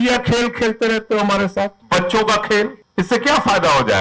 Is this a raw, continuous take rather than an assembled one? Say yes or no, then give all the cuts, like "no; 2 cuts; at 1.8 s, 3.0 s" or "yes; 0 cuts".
no; 2 cuts; at 1.8 s, 2.8 s